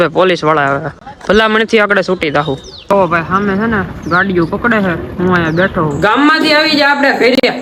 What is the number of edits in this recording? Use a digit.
0